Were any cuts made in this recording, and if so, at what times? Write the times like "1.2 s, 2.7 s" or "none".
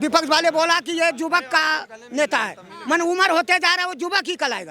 none